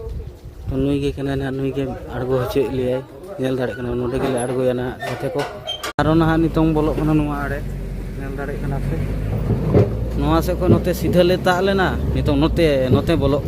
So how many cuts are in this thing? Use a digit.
1